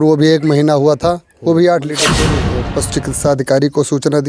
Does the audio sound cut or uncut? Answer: cut